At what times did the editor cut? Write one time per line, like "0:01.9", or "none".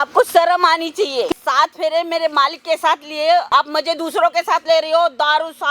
0:01.3
0:03.5